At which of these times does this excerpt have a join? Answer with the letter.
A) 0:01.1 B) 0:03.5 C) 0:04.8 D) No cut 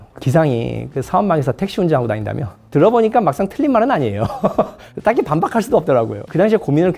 C